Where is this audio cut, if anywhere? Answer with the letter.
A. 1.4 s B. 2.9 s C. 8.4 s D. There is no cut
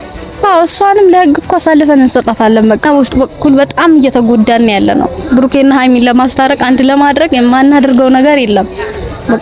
B